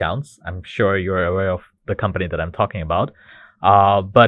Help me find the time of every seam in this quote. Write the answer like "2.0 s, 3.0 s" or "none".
none